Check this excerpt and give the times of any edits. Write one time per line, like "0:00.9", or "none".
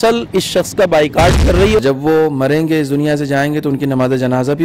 0:01.8